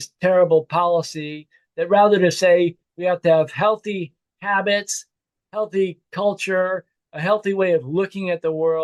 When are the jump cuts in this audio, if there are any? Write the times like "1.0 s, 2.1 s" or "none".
none